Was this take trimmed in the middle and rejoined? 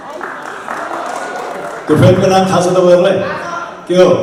no; 0 cuts

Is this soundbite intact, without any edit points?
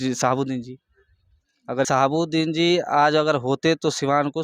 no; 1 cut; at 1.9 s

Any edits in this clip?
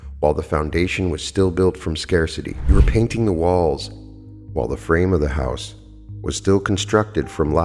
yes; 1 cut; at 2.5 s

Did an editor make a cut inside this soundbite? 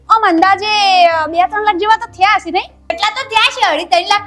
yes; 1 cut; at 3.0 s

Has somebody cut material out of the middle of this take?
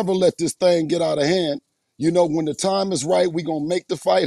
no; 0 cuts

